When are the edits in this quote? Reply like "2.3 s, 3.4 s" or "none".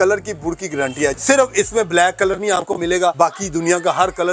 1.1 s, 3.1 s